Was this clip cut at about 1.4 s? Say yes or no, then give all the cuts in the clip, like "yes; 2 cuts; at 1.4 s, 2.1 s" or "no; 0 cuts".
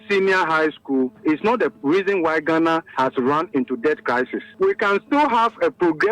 yes; 3 cuts; at 1.4 s, 2.9 s, 4.5 s